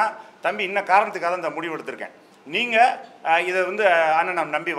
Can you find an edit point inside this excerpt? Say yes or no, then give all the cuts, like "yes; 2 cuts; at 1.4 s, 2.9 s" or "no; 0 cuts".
no; 0 cuts